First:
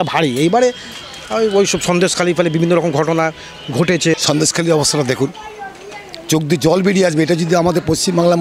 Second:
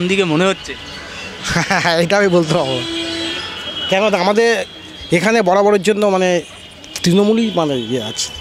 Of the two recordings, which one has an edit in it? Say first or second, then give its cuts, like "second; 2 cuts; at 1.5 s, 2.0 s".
first; 1 cut; at 4.1 s